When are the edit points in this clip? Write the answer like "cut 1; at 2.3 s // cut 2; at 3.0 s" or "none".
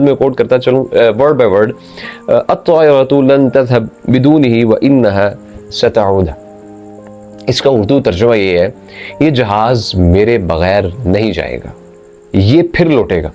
none